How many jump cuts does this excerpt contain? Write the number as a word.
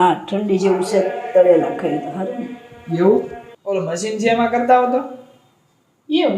one